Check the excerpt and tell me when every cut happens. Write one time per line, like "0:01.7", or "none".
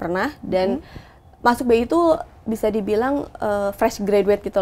none